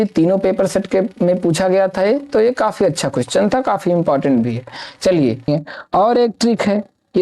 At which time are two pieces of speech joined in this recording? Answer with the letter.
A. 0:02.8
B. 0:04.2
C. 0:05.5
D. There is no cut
C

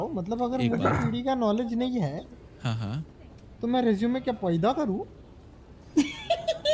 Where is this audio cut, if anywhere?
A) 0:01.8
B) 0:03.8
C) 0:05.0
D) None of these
D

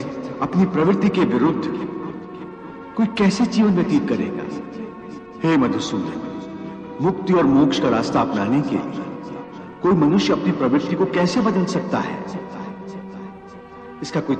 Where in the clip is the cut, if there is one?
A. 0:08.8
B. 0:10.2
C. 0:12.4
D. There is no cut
D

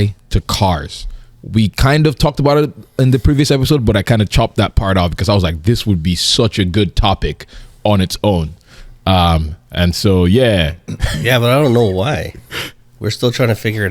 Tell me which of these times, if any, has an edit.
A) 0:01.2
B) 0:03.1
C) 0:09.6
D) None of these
D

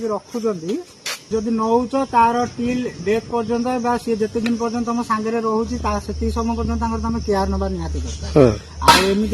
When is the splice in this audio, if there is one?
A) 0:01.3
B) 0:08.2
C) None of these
A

